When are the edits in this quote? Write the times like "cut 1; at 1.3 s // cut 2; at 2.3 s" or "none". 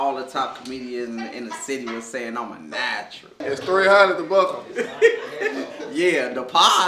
cut 1; at 3.4 s